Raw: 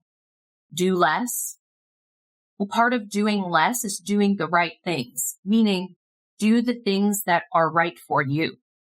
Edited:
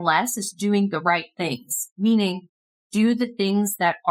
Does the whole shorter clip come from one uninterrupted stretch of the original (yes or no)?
yes